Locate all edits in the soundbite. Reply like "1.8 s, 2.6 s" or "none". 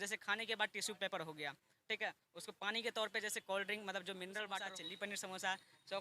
4.7 s